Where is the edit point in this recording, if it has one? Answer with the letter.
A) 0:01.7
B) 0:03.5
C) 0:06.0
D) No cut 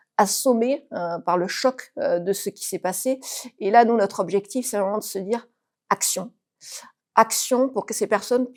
D